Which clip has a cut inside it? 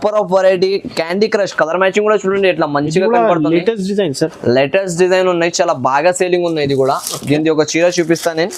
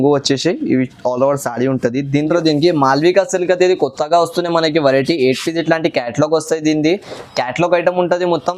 second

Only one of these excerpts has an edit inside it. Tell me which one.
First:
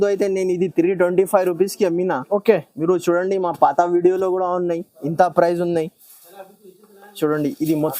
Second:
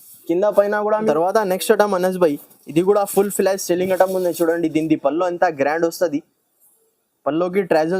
second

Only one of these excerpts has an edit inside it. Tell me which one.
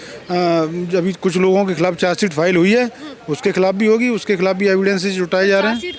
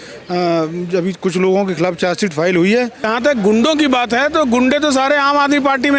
second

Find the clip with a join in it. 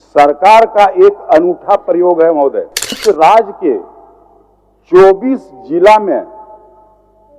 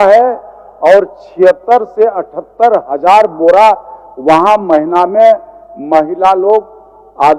first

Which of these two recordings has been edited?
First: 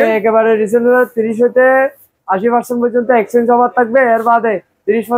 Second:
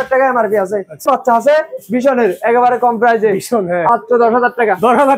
second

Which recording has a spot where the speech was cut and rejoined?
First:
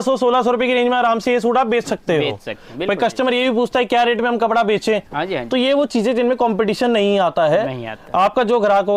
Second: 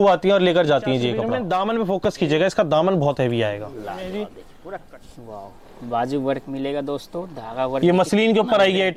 second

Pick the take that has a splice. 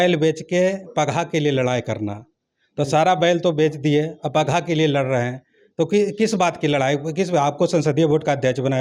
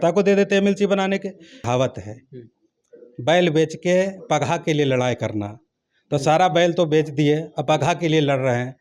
second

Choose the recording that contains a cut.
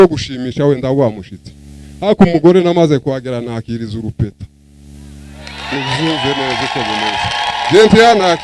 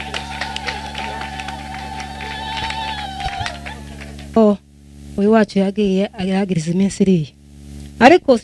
second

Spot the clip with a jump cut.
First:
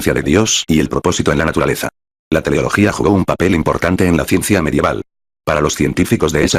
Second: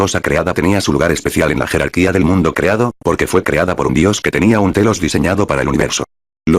first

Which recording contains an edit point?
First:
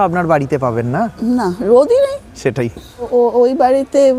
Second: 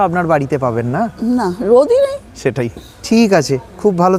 first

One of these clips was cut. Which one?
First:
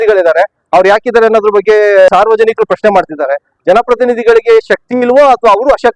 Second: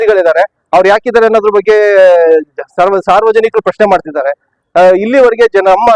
first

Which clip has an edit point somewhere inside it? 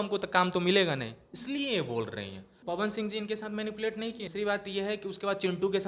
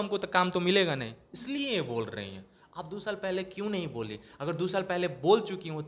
first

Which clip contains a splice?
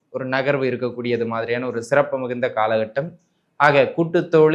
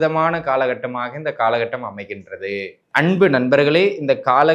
second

